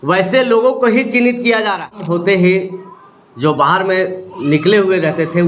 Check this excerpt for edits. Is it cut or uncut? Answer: cut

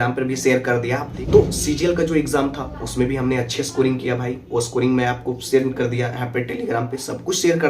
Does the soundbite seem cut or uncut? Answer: cut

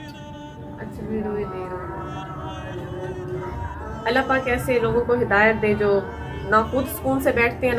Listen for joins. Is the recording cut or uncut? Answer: cut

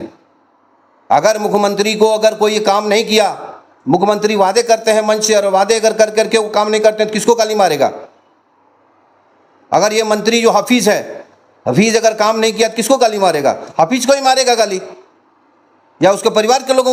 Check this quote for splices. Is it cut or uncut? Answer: uncut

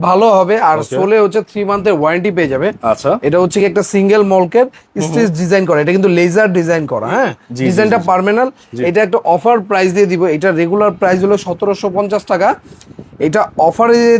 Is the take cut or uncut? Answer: uncut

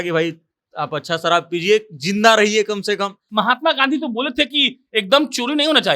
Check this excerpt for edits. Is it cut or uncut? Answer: cut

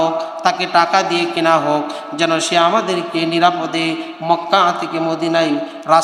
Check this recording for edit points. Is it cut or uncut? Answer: uncut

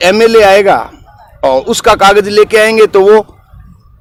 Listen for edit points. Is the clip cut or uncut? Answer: uncut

